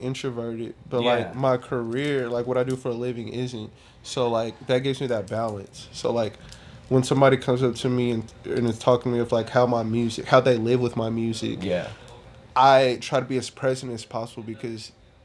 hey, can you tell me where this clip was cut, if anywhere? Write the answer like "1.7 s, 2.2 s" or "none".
none